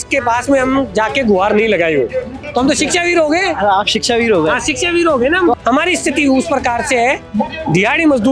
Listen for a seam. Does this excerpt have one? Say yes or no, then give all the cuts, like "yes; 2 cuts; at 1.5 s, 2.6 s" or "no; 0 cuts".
yes; 2 cuts; at 2.4 s, 5.6 s